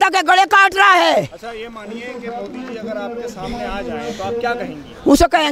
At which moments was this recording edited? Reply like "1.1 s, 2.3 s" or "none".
none

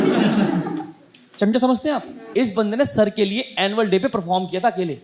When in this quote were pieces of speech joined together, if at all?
2.1 s

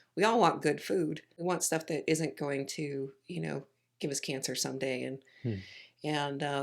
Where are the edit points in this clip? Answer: 1.3 s

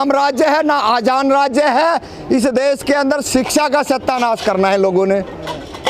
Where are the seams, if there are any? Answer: none

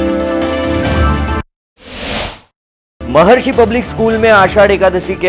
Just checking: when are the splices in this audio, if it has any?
none

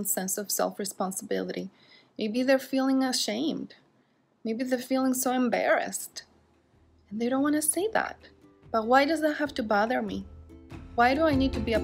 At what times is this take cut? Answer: 10.9 s

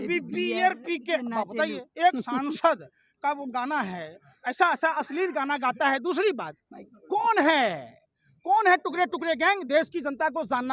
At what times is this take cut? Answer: none

